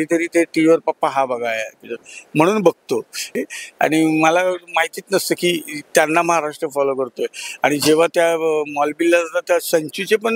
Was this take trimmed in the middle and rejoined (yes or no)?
yes